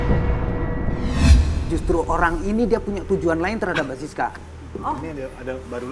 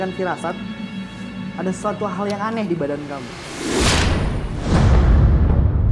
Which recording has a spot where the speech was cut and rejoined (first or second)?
first